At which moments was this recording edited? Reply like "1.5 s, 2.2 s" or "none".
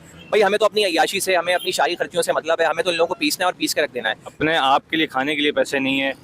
4.3 s